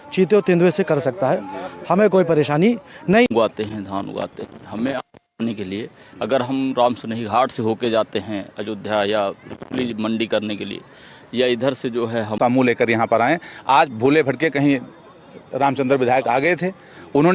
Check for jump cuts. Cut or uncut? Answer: cut